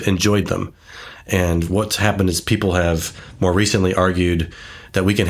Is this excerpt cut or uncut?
uncut